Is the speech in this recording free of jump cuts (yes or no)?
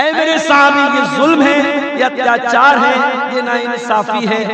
yes